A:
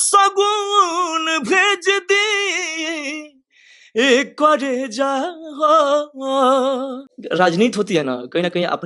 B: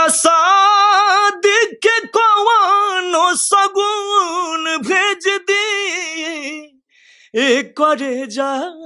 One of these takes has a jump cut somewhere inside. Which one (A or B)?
A